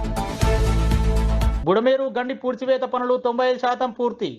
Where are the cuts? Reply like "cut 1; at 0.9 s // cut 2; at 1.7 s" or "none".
cut 1; at 1.5 s